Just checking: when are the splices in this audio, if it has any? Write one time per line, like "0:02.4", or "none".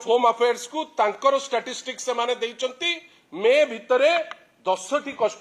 none